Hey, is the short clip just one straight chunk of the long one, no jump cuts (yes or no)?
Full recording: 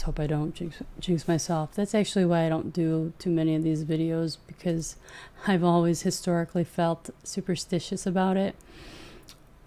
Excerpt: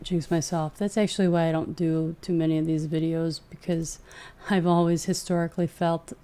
yes